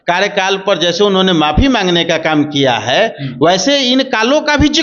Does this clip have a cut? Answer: no; 0 cuts

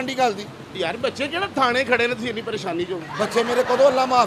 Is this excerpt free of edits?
yes; 0 cuts

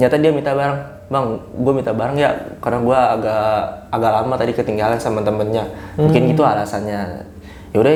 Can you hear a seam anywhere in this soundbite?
no; 0 cuts

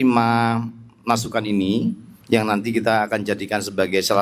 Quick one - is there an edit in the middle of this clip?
yes; 1 cut; at 2.1 s

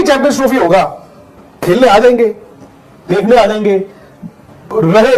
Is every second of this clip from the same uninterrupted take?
yes; 0 cuts

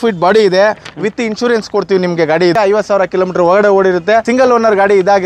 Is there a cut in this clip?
yes; 2 cuts; at 2.5 s, 4.3 s

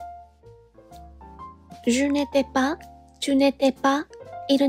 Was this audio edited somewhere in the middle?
yes; 1 cut; at 1.3 s

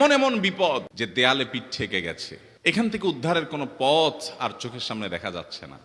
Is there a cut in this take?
no; 0 cuts

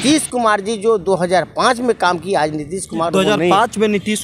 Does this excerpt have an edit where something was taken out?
no; 0 cuts

